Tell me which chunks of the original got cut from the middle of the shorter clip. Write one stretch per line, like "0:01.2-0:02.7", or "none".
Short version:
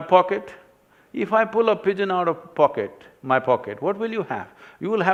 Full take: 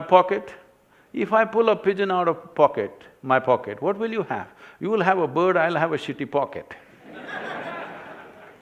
none